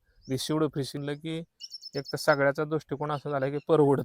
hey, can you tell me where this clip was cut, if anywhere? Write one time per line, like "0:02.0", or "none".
0:01.0